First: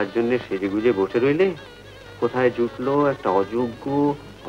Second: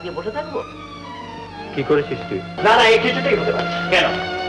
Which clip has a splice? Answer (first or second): second